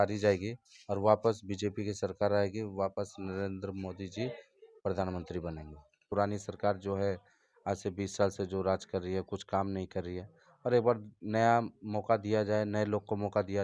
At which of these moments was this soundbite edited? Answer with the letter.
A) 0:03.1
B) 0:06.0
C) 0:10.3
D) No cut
B